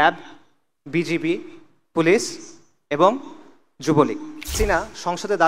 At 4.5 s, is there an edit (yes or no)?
yes